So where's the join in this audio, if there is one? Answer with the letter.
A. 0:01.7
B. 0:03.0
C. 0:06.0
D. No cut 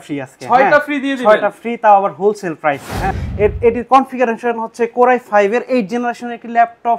B